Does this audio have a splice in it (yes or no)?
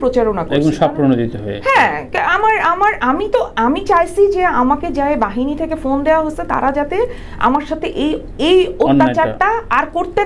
no